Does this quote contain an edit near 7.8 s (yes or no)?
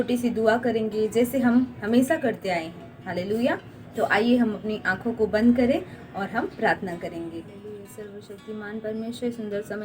yes